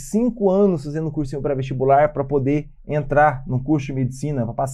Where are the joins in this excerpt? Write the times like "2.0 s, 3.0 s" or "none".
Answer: none